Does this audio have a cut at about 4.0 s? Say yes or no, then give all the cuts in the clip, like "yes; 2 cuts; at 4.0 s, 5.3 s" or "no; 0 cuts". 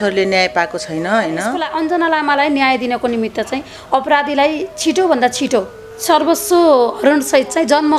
no; 2 cuts; at 1.6 s, 5.8 s